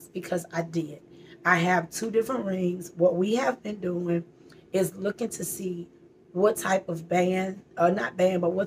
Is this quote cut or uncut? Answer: uncut